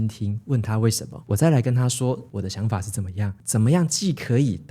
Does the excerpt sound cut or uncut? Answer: cut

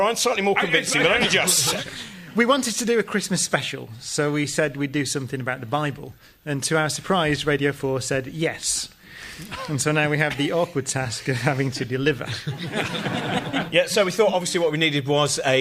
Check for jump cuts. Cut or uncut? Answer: cut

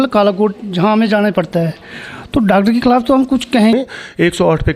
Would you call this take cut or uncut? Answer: cut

